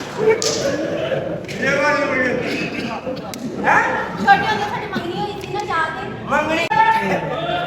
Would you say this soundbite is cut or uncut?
cut